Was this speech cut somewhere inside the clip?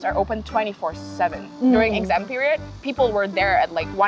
yes; 1 cut; at 2.8 s

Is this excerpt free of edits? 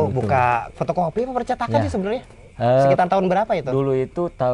yes; 0 cuts

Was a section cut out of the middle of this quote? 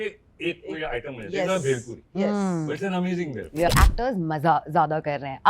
yes; 1 cut; at 3.7 s

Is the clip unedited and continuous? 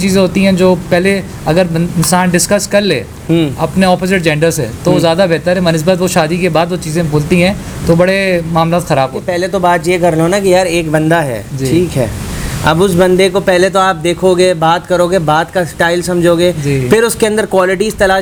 yes; 0 cuts

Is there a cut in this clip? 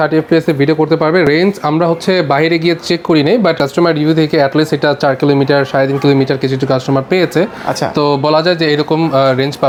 no; 0 cuts

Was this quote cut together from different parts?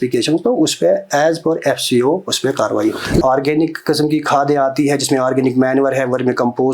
yes; 1 cut; at 3.2 s

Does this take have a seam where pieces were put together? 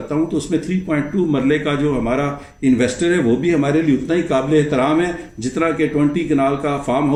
no; 0 cuts

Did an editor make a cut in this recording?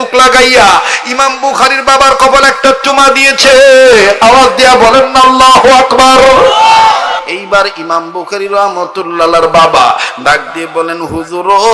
yes; 1 cut; at 7.2 s

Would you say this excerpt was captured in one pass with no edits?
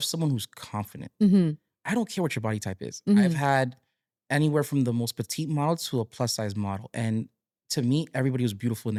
yes; 0 cuts

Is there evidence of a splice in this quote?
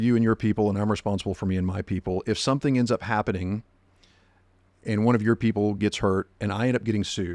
no; 0 cuts

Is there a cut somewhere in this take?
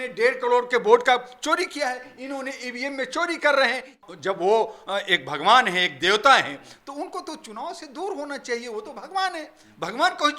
yes; 1 cut; at 4.0 s

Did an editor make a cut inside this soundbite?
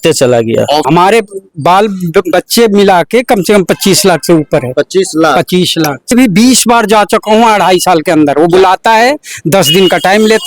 yes; 2 cuts; at 0.8 s, 6.1 s

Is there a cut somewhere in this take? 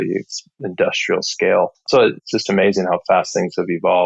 yes; 1 cut; at 1.8 s

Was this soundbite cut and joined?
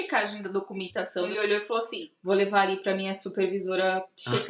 yes; 1 cut; at 1.3 s

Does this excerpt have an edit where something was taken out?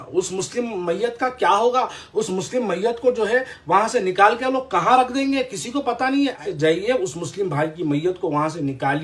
yes; 1 cut; at 6.4 s

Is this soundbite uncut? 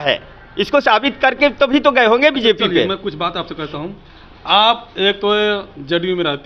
yes; 0 cuts

